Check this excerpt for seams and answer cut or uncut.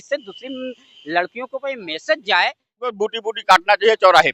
cut